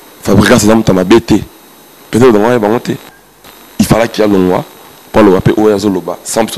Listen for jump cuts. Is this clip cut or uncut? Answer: uncut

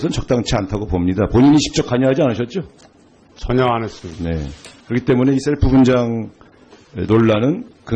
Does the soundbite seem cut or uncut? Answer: uncut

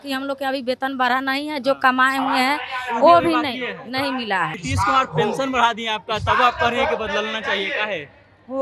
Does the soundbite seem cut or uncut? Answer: cut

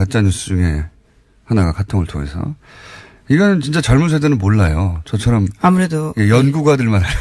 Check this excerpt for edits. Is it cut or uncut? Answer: uncut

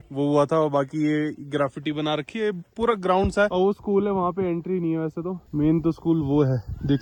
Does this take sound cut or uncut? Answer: uncut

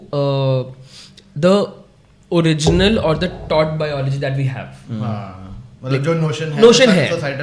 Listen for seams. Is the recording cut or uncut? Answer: uncut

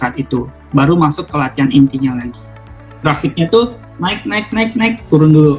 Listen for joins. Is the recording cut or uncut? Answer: cut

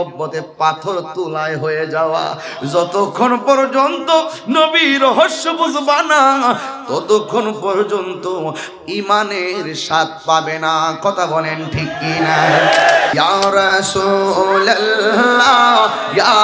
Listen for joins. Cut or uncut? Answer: cut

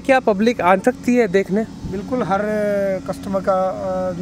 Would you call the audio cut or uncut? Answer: uncut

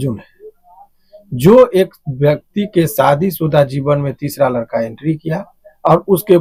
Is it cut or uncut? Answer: uncut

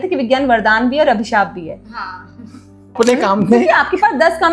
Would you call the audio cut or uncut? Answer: cut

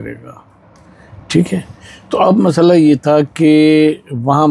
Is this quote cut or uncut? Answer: uncut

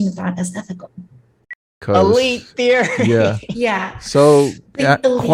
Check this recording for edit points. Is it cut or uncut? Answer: cut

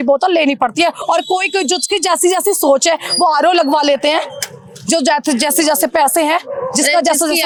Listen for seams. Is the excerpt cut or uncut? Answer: uncut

